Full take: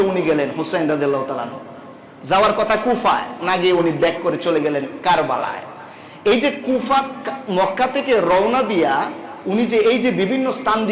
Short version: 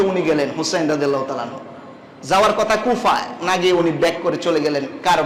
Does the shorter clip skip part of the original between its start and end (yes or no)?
no